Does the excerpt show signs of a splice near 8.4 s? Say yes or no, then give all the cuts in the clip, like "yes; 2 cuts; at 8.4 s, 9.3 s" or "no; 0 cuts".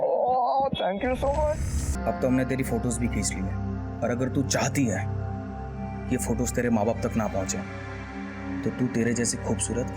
no; 1 cut; at 1.9 s